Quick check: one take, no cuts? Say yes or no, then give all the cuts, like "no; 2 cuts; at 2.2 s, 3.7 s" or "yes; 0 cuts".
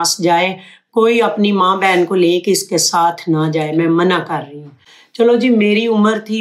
yes; 0 cuts